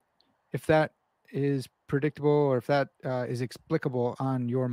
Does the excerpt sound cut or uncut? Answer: uncut